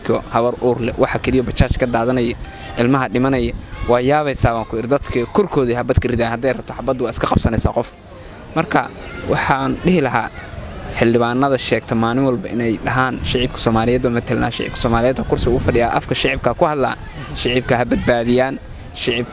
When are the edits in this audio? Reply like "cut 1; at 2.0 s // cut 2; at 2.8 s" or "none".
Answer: none